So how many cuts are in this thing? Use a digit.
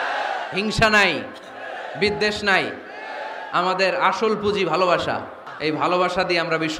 1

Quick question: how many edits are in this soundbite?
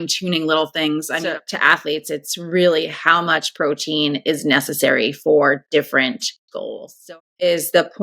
2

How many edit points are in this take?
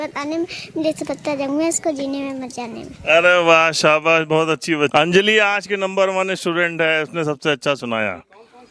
1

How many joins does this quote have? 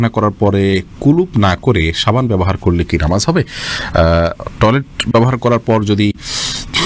0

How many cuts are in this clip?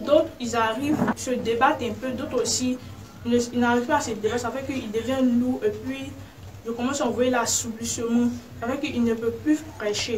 1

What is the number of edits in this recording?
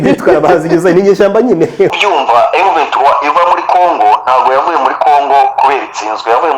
1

